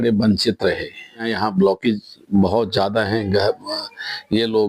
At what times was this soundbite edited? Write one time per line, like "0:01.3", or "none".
0:01.2